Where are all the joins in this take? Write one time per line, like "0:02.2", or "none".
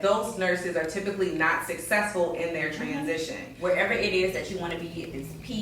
0:03.4